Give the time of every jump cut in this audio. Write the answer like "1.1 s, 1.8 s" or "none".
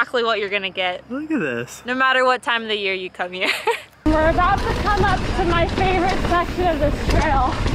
3.9 s